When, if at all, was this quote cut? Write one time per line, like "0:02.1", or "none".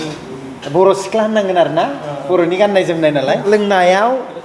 0:03.4